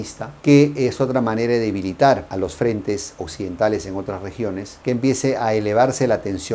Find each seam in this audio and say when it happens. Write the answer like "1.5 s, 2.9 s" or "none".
none